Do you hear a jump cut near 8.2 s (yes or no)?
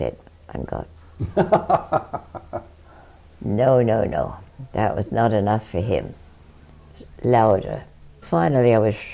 yes